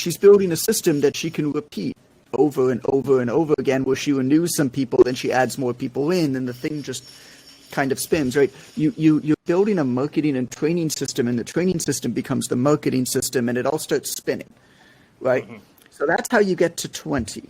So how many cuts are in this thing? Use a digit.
0